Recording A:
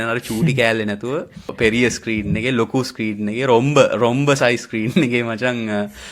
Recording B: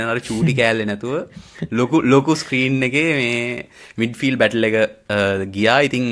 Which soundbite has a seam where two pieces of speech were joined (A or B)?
A